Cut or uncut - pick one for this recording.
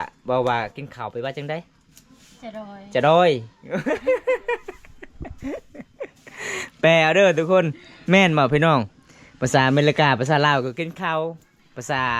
uncut